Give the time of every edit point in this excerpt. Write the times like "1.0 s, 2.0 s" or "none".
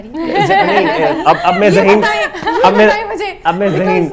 none